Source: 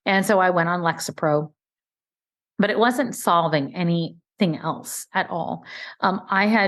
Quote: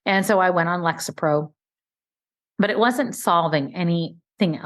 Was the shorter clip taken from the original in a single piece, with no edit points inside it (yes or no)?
yes